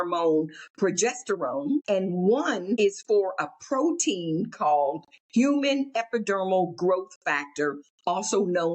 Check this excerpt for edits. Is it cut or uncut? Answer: cut